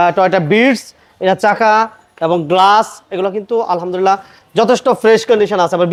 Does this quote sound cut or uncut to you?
uncut